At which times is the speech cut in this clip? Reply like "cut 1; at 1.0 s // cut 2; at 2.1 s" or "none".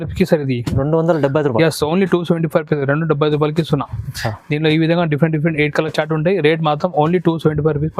none